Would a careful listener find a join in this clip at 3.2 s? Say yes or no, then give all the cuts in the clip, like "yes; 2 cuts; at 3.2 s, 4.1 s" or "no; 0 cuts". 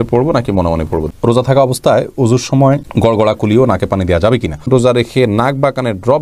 no; 2 cuts; at 1.1 s, 4.7 s